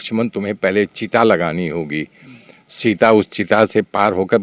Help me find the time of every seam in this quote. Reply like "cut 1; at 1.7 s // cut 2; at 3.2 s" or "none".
none